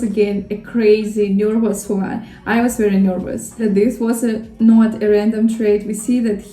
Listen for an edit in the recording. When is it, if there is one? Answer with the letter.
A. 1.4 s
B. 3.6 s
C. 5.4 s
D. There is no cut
B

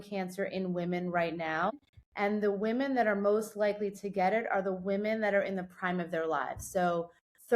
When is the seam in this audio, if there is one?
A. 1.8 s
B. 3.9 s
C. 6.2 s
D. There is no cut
A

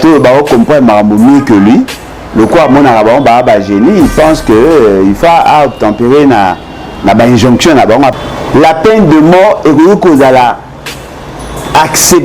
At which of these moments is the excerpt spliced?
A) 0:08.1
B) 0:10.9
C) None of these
A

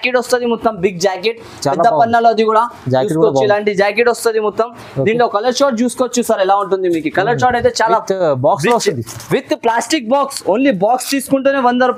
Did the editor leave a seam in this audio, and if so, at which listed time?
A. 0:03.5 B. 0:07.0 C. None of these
C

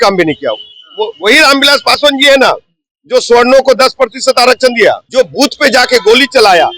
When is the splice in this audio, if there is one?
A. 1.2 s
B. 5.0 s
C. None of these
B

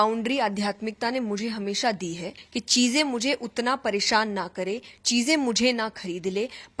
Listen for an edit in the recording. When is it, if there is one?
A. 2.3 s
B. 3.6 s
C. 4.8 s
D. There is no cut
A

